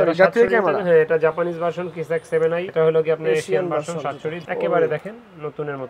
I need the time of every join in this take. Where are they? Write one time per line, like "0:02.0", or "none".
0:04.4